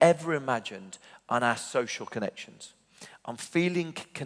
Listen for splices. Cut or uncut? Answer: uncut